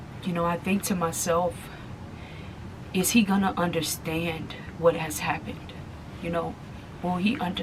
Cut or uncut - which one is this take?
uncut